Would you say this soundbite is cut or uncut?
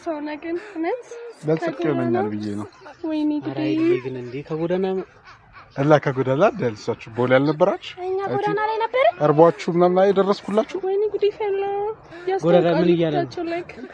uncut